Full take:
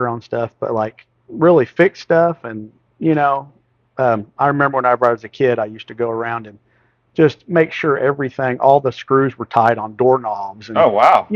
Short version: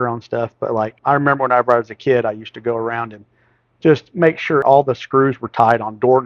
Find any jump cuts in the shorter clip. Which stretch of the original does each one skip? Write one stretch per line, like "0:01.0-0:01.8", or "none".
0:01.0-0:04.3
0:08.0-0:08.6